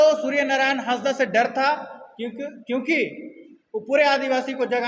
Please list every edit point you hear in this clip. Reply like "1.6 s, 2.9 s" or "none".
none